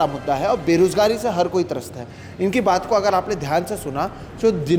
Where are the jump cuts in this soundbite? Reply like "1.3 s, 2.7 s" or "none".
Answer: none